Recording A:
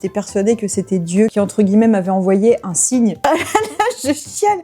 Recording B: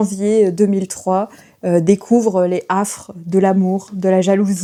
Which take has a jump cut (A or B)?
A